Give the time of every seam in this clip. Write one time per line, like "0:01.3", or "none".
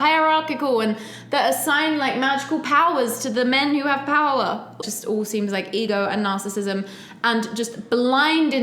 0:04.7